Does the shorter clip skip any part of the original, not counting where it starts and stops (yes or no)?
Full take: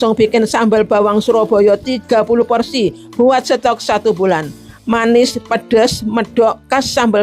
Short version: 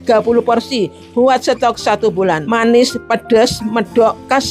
yes